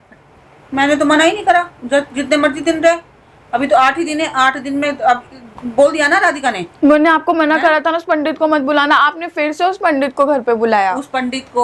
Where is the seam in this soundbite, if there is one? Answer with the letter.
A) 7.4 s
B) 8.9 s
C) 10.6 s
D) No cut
D